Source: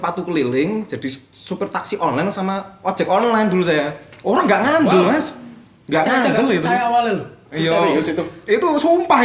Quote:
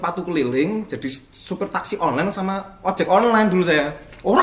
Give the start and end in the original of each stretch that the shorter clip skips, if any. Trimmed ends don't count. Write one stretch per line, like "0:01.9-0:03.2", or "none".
none